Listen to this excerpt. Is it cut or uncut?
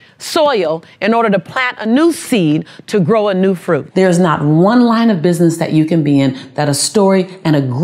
cut